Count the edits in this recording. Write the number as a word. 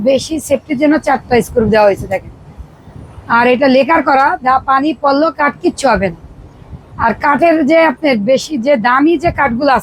zero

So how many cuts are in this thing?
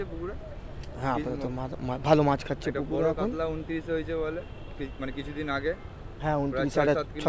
zero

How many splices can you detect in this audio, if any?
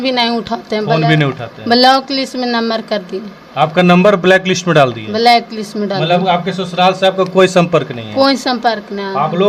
zero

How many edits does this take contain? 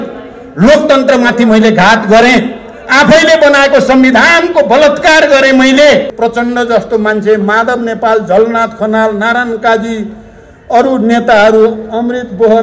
one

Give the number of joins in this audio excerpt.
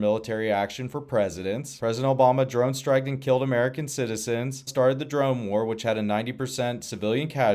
zero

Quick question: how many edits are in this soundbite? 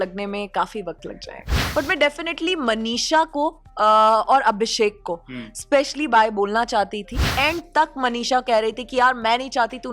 two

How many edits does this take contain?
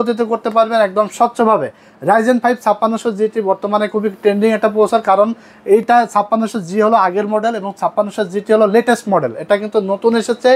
zero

